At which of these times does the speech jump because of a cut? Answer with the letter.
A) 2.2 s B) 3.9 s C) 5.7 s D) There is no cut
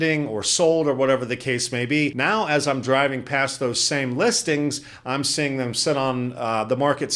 A